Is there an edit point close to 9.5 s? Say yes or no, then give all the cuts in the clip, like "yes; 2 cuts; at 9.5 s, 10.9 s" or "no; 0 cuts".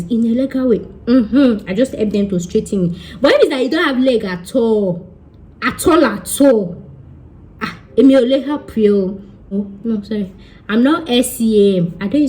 yes; 1 cut; at 9.5 s